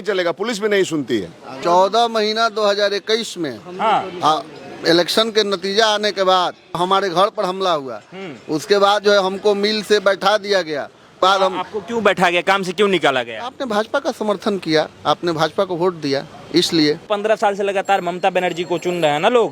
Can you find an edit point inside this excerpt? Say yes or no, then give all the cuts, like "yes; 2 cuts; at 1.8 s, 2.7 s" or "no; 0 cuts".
yes; 4 cuts; at 1.5 s, 6.8 s, 11.2 s, 17.1 s